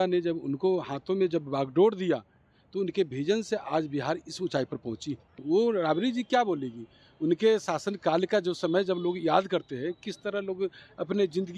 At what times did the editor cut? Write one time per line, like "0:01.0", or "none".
0:05.3